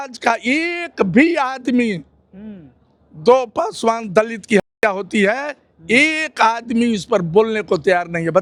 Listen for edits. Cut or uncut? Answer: uncut